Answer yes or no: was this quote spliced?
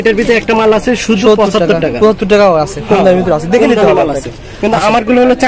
no